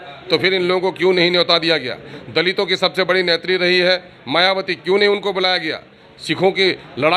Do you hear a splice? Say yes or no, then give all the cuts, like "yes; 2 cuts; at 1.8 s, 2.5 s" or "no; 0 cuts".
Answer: no; 0 cuts